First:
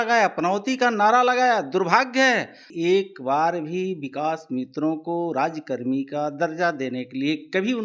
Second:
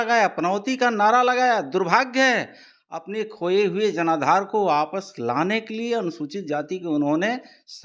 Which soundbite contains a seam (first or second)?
first